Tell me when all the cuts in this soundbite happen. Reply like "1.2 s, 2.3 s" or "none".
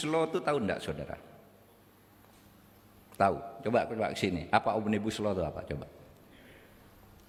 none